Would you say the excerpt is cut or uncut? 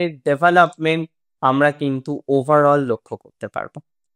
uncut